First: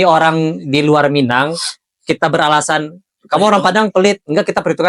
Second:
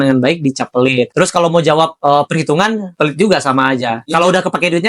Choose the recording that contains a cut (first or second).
second